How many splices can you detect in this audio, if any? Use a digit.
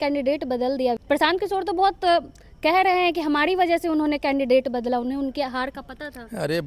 1